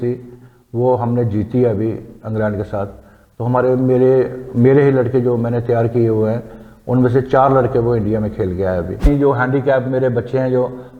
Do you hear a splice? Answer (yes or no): yes